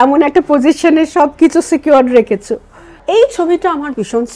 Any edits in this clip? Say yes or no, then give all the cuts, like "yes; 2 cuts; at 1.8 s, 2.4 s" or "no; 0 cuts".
yes; 1 cut; at 3.0 s